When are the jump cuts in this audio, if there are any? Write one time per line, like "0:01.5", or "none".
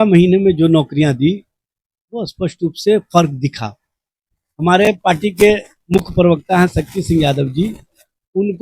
0:04.4